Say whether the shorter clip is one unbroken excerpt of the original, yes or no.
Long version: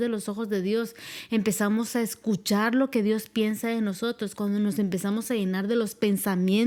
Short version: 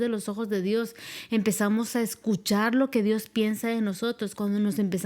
yes